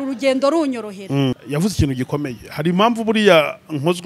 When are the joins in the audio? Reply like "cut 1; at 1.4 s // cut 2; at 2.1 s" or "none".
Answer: cut 1; at 1.3 s